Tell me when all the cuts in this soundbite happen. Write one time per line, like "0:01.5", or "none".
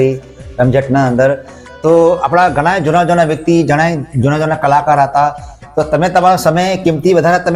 none